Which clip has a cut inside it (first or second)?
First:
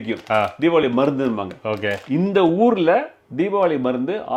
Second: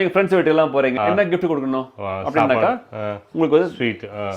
second